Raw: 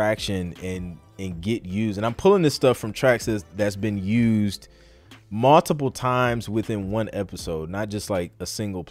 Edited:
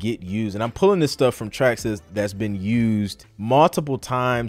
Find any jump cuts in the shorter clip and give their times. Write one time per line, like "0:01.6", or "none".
0:03.3